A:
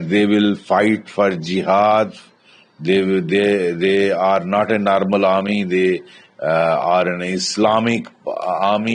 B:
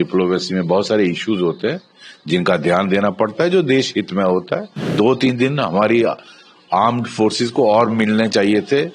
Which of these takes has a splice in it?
B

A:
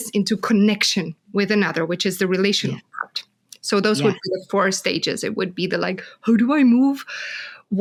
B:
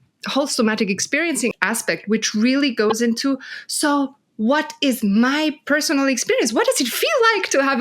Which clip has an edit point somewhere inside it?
B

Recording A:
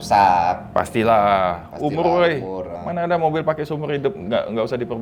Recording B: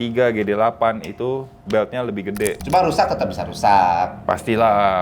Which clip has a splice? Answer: B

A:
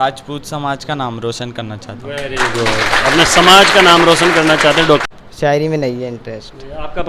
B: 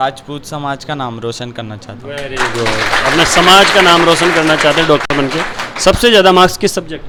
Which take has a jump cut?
A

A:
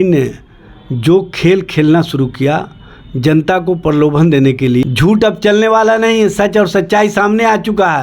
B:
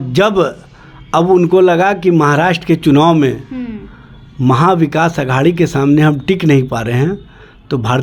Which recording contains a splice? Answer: A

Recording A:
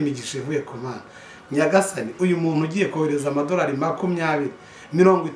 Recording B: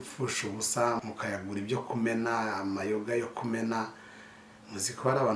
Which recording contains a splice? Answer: B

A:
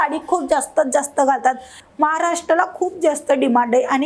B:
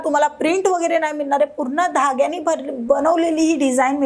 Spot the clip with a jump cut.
A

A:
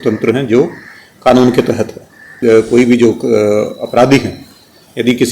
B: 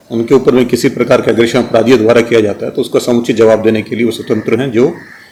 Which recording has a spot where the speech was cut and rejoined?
A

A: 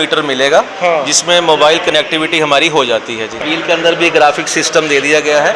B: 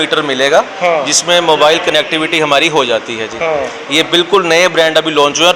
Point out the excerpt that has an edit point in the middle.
A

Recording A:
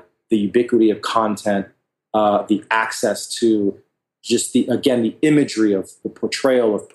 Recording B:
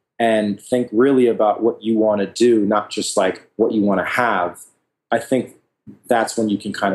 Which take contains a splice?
A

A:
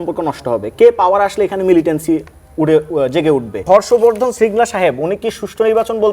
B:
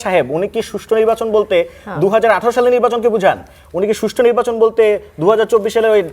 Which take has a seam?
A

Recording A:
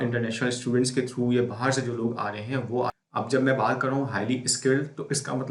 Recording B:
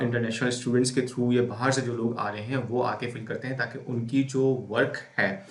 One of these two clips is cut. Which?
A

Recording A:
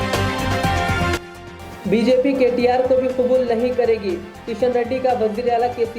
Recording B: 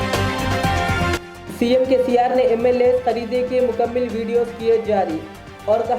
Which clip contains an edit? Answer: B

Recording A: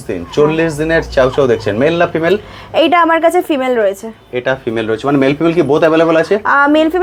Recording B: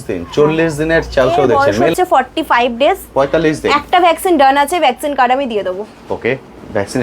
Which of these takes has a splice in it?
B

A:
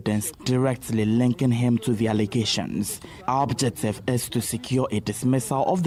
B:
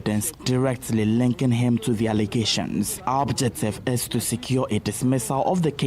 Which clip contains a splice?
B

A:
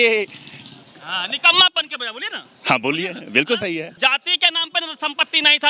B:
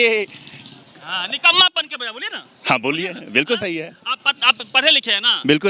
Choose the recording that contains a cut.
A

